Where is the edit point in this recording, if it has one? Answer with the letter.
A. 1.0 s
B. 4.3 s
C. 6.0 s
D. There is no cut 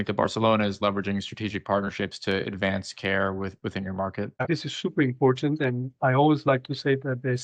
B